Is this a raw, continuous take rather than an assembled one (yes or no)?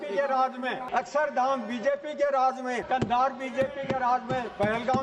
no